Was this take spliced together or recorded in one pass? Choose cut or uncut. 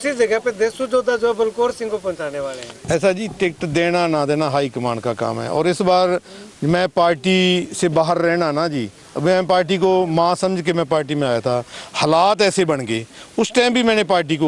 cut